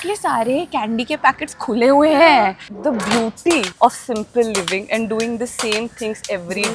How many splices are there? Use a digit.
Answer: 2